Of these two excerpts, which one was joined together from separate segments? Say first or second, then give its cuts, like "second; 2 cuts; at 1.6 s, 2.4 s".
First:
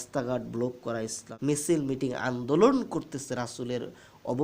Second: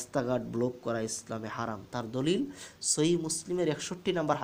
first; 1 cut; at 1.2 s